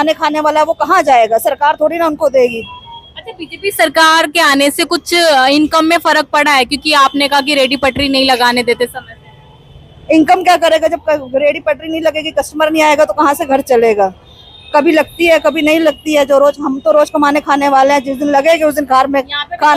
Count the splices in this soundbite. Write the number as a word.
zero